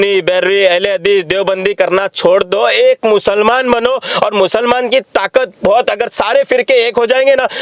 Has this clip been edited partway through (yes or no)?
no